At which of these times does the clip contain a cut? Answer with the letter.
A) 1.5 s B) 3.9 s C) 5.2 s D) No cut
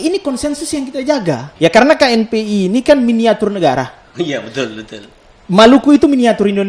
A